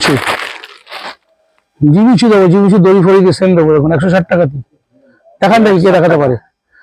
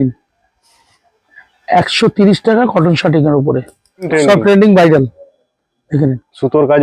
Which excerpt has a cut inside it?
second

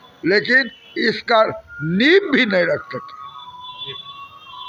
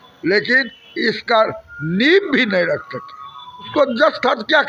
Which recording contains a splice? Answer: second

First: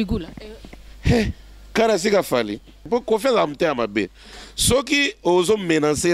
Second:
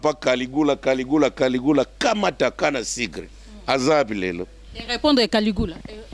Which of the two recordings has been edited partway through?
first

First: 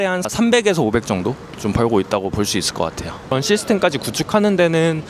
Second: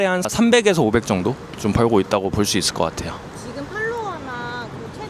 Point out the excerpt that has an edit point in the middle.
first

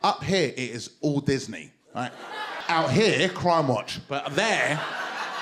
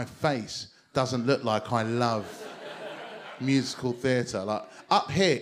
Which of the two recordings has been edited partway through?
first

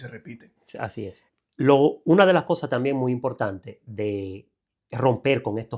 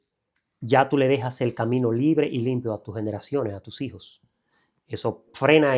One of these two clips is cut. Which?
first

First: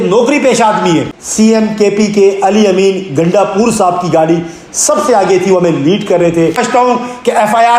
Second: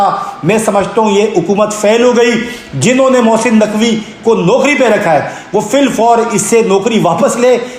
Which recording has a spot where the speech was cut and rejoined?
first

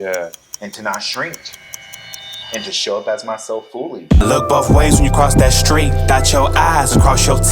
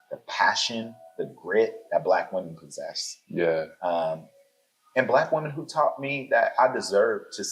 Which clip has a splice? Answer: first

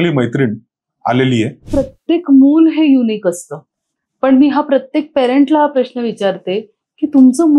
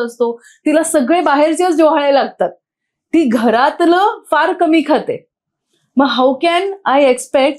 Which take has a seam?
first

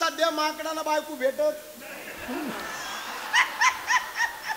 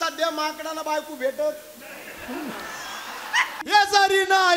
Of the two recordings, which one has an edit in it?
second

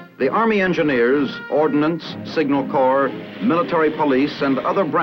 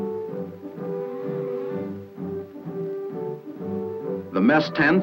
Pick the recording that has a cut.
second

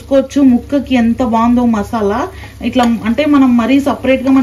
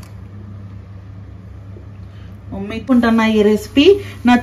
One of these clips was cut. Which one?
second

